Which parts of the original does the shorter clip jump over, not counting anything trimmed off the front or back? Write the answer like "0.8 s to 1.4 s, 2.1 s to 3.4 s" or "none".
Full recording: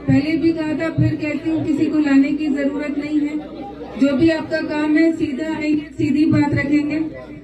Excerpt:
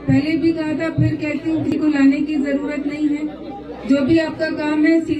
1.7 s to 1.8 s